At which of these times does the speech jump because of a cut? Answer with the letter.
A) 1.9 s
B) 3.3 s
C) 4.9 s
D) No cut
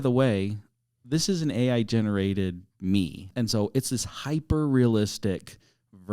B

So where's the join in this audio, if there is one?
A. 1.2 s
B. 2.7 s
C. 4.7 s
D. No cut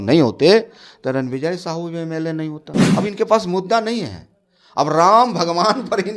B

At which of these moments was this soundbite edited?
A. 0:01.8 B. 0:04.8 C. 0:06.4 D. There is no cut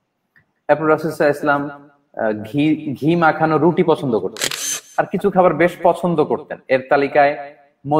B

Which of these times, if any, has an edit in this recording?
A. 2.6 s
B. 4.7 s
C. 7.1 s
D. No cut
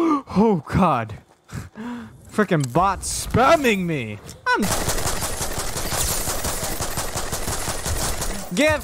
B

